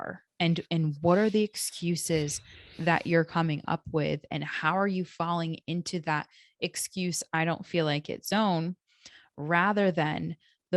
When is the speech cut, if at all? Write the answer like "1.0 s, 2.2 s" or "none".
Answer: none